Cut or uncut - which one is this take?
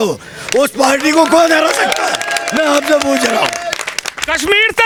uncut